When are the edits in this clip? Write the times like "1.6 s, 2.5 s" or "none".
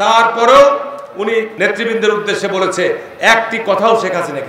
1.5 s